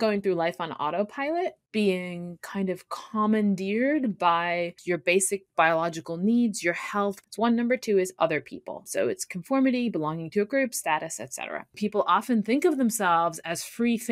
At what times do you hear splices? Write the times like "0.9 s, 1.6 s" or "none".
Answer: 1.6 s, 4.8 s, 7.2 s, 8.8 s, 11.8 s